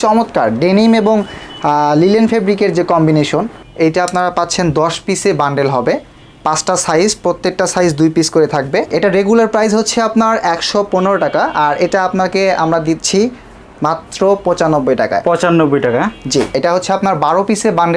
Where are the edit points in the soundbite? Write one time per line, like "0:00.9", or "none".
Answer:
0:03.6
0:08.9
0:16.6